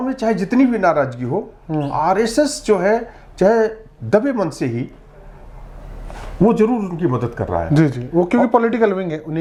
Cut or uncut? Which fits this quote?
uncut